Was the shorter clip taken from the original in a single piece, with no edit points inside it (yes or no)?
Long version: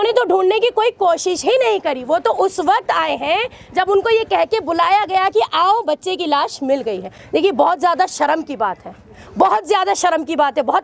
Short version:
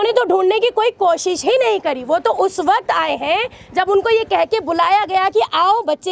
yes